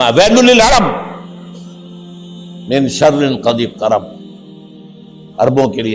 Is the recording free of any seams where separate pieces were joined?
no; 2 cuts; at 1.1 s, 2.5 s

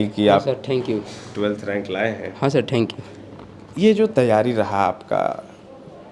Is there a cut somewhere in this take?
no; 0 cuts

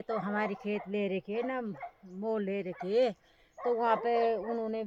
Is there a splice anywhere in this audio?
no; 0 cuts

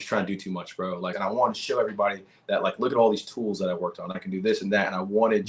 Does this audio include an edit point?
yes; 1 cut; at 1.1 s

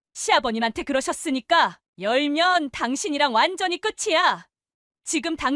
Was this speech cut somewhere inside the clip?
yes; 1 cut; at 1.8 s

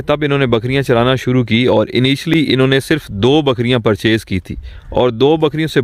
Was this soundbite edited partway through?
no; 0 cuts

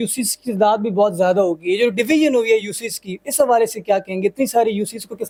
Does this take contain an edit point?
no; 0 cuts

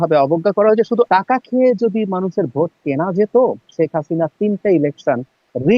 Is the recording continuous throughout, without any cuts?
no; 1 cut; at 1.1 s

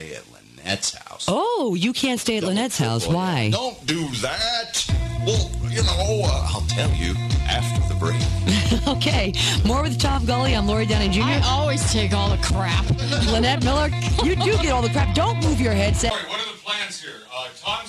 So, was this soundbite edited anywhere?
yes; 1 cut; at 16.1 s

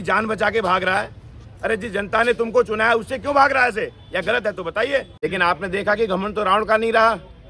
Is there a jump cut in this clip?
yes; 1 cut; at 5.1 s

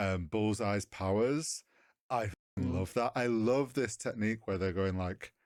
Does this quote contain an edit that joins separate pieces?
no; 0 cuts

